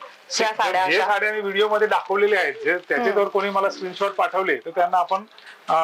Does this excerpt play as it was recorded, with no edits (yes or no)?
yes